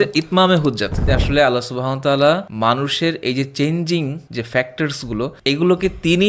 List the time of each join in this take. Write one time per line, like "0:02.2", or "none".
0:01.0
0:02.5
0:04.2
0:05.4